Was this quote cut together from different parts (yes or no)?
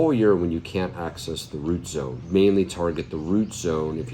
yes